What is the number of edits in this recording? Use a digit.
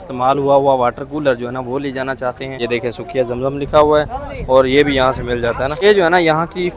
2